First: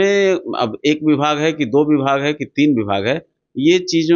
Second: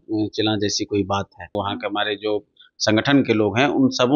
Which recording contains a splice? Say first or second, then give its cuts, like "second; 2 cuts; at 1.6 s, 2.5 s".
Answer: second; 1 cut; at 1.6 s